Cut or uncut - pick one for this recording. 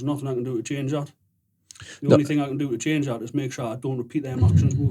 uncut